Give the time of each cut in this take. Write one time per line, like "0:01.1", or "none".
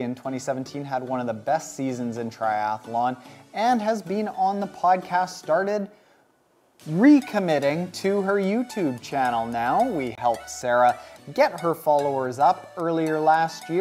0:01.4
0:09.3